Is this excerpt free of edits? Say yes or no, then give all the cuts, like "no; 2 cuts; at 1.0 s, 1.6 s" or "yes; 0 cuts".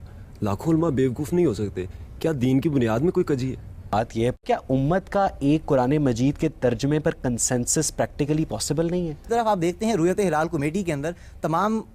no; 2 cuts; at 3.9 s, 9.3 s